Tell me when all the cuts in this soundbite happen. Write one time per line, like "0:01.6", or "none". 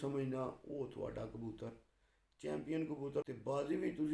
0:03.2